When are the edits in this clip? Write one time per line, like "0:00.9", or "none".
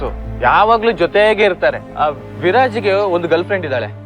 0:01.9